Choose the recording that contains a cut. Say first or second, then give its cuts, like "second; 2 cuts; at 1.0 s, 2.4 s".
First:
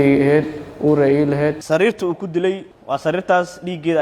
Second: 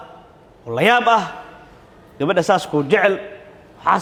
first; 2 cuts; at 1.6 s, 2.7 s